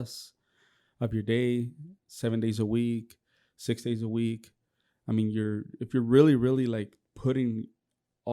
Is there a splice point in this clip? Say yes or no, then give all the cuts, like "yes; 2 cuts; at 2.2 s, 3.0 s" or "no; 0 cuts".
no; 0 cuts